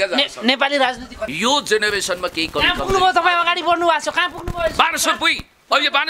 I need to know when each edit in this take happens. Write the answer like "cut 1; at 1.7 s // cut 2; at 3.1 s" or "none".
cut 1; at 1.3 s